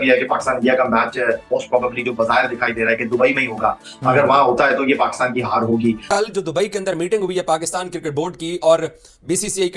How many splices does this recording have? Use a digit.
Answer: 1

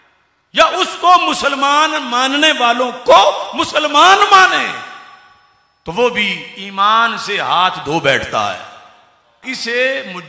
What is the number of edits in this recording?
1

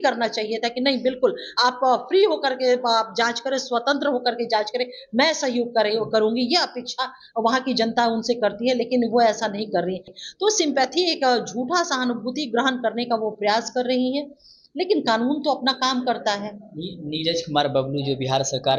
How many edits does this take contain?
0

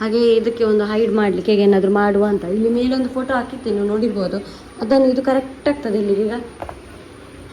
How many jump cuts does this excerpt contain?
0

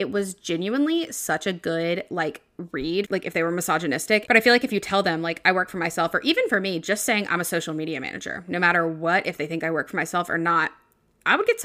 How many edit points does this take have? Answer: 2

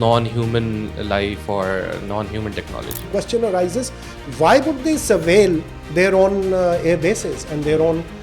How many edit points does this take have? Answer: 2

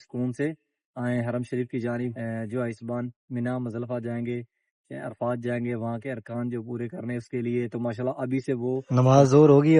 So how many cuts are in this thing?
2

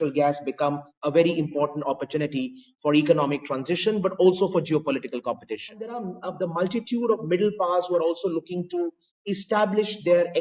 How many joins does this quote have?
1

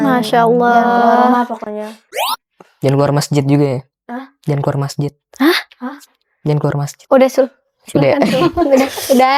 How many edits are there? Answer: 0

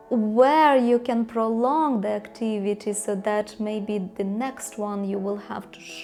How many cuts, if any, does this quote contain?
0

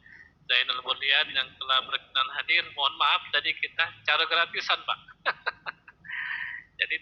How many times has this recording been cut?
0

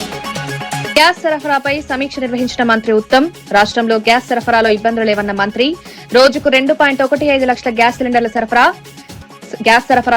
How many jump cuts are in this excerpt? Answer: 1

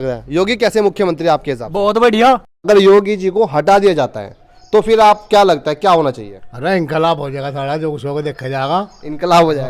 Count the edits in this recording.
1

